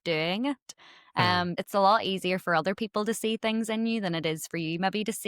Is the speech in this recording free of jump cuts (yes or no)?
no